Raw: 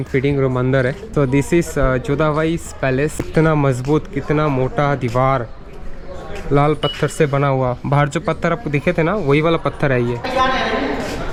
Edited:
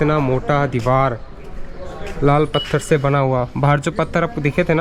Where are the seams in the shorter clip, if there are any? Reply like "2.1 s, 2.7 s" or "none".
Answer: none

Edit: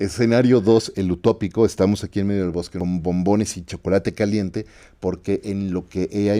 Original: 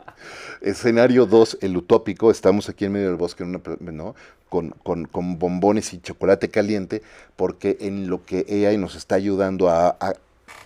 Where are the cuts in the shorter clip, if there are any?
2.7 s

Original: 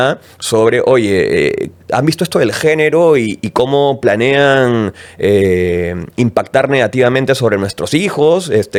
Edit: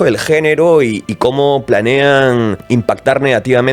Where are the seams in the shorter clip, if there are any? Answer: 2.6 s

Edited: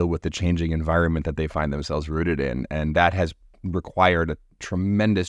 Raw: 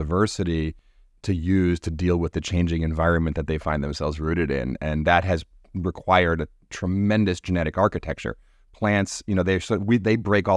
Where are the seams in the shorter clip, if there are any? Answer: none

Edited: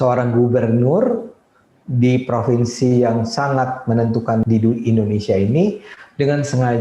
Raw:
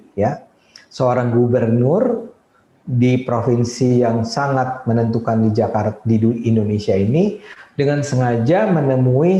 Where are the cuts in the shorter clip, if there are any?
4.4 s

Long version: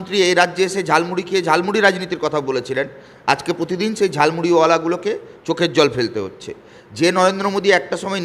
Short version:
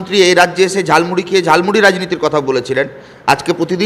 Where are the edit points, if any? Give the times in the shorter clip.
none

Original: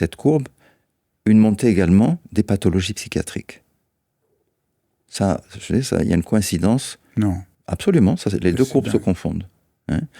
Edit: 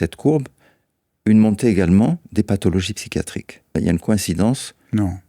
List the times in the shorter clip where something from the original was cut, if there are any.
3.7 s

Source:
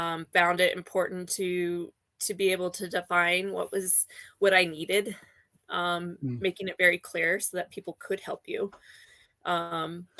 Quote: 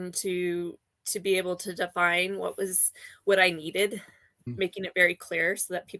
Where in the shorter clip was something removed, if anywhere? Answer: 4.4 s

